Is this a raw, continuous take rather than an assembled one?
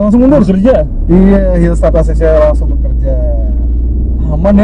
yes; 0 cuts

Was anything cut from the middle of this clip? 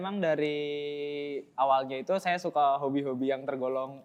no; 0 cuts

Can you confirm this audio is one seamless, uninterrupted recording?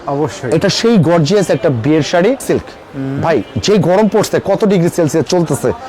no; 1 cut; at 2.4 s

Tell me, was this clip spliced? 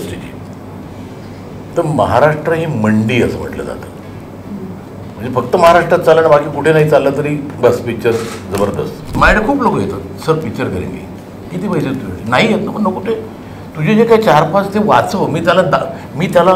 yes; 1 cut; at 9.1 s

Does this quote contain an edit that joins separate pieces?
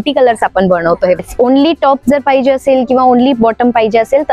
yes; 1 cut; at 1.3 s

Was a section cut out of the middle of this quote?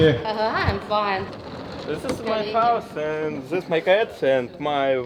yes; 1 cut; at 1.4 s

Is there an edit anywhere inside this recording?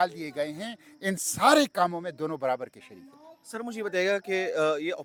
no; 0 cuts

